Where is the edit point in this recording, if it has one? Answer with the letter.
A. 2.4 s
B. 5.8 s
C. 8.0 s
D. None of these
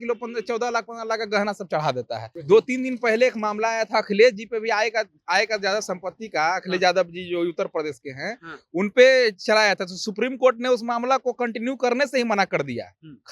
A